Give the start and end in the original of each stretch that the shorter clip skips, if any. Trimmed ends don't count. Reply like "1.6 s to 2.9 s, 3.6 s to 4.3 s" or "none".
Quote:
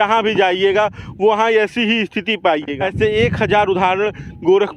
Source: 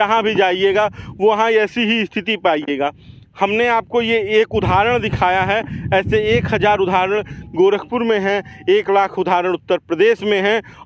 2.8 s to 5.9 s